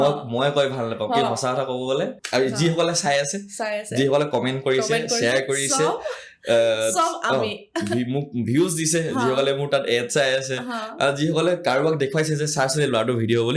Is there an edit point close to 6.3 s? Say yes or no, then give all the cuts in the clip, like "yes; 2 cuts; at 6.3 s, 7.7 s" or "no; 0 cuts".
no; 1 cut; at 2.2 s